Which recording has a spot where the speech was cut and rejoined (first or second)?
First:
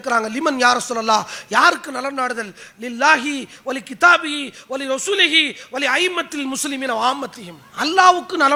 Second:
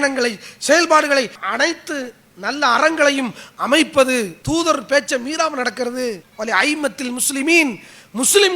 second